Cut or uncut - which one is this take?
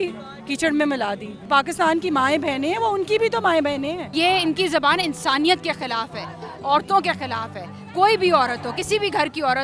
cut